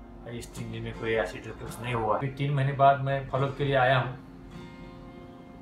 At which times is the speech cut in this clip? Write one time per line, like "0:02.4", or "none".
0:02.2